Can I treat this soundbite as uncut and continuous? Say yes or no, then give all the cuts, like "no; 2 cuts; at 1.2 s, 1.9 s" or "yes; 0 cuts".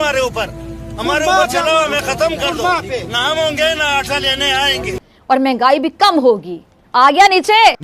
no; 1 cut; at 5.0 s